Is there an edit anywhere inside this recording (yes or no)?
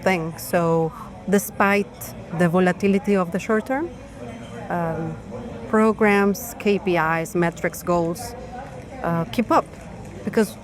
no